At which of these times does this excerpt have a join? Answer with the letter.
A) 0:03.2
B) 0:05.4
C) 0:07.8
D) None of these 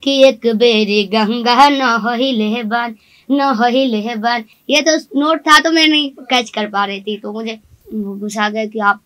C